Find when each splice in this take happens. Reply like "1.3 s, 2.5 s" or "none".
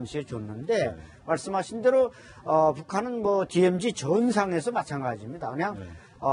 3.1 s